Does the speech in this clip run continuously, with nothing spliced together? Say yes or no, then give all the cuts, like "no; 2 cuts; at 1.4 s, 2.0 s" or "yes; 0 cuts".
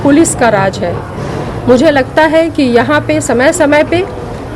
yes; 0 cuts